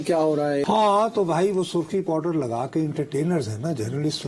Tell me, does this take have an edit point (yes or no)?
no